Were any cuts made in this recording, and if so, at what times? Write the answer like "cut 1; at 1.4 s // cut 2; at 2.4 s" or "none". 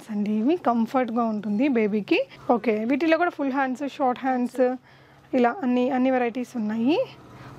cut 1; at 2.3 s